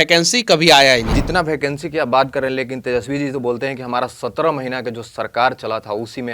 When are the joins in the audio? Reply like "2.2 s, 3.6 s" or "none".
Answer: 1.1 s